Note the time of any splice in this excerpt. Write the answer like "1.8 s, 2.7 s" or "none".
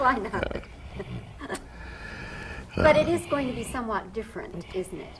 none